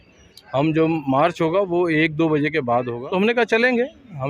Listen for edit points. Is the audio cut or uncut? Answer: cut